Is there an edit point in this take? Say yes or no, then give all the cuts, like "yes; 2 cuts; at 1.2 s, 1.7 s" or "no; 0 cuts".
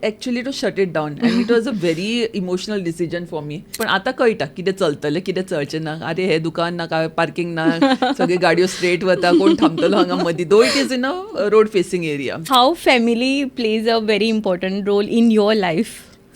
yes; 2 cuts; at 3.7 s, 12.5 s